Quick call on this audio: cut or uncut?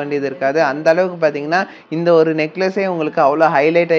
uncut